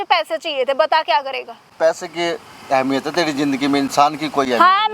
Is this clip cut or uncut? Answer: cut